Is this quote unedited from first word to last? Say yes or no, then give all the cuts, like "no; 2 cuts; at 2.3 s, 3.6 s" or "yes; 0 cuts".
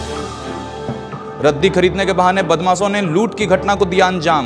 no; 1 cut; at 1.1 s